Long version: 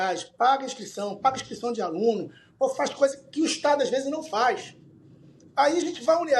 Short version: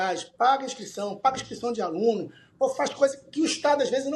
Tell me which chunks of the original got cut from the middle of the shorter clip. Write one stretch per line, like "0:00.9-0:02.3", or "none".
none